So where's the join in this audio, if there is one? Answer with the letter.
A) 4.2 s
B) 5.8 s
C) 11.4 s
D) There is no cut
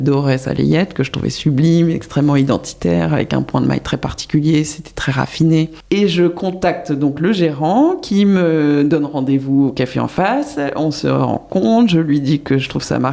B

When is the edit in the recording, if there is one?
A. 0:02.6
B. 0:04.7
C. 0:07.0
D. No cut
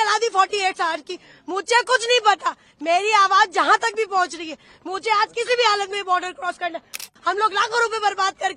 C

